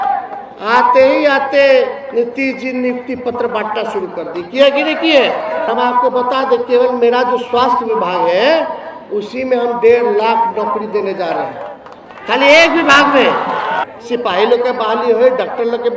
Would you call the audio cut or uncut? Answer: cut